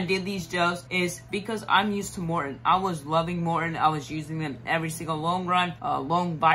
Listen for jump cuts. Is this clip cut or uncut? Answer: uncut